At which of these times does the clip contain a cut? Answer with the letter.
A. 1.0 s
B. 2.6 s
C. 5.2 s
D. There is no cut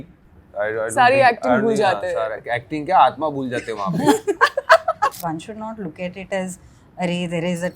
C